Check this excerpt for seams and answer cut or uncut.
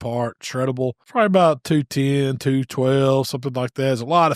cut